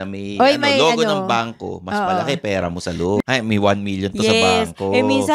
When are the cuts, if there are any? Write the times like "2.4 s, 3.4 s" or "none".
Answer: 3.2 s